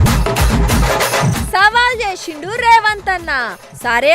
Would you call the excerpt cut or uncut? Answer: uncut